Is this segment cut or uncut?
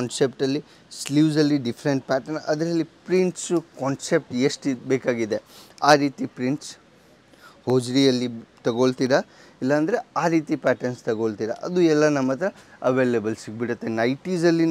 uncut